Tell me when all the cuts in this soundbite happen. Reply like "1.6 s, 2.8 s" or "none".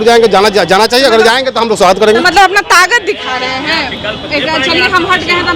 none